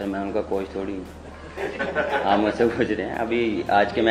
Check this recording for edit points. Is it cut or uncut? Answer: uncut